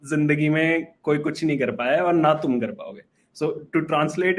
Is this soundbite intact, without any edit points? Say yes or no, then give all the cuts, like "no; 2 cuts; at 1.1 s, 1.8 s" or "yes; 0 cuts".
yes; 0 cuts